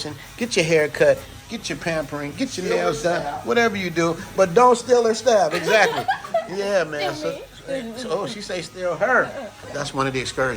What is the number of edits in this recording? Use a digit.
1